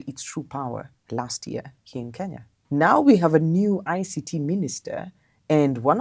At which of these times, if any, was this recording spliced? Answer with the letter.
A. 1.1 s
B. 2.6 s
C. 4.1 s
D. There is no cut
B